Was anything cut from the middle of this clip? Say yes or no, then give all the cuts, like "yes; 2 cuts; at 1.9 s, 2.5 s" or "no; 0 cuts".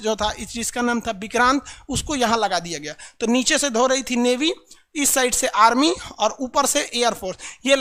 no; 0 cuts